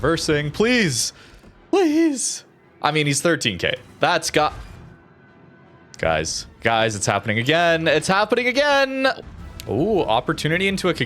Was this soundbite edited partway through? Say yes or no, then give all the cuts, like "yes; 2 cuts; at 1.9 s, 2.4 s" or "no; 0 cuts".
yes; 1 cut; at 9.2 s